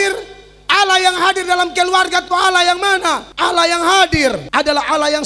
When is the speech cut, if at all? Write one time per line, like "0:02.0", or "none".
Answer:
0:03.3
0:04.4